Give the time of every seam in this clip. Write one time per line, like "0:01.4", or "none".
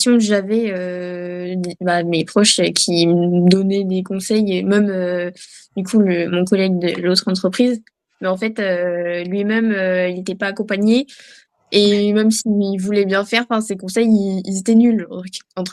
none